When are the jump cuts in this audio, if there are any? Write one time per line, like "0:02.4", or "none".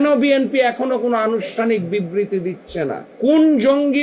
0:03.0